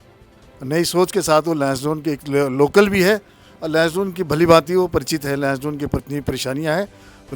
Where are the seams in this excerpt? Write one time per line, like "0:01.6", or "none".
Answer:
0:06.0